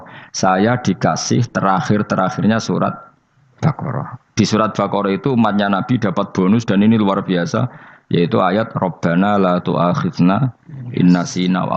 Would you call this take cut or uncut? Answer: uncut